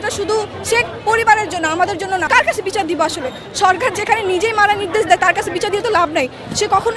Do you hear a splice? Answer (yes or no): yes